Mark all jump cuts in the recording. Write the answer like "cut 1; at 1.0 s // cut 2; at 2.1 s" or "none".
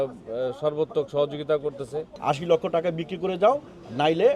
cut 1; at 2.0 s